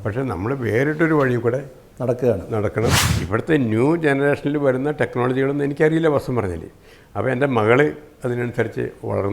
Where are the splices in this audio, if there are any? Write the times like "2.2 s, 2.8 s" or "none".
3.1 s